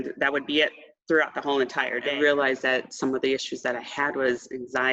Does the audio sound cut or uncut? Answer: cut